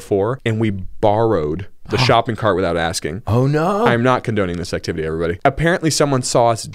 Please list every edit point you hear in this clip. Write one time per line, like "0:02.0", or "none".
none